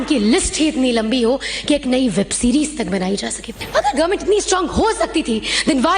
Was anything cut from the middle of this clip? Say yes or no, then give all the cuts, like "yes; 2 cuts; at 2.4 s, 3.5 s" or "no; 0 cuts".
yes; 1 cut; at 3.6 s